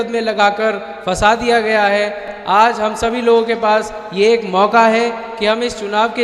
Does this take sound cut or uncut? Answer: uncut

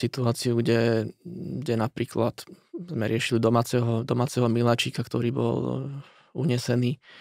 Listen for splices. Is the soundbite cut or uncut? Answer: uncut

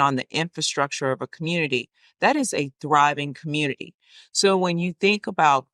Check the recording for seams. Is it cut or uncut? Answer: uncut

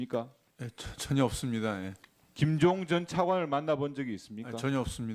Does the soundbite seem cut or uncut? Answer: cut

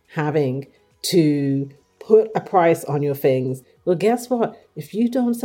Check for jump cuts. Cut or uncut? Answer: cut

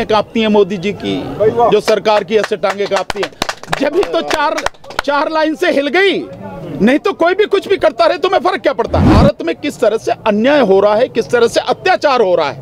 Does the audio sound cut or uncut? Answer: cut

